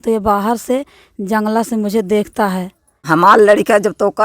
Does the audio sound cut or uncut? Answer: cut